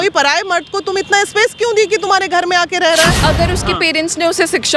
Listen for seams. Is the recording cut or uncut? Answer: cut